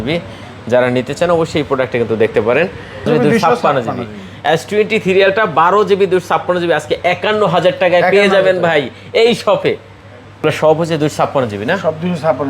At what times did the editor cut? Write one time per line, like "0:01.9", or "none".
0:03.1
0:10.4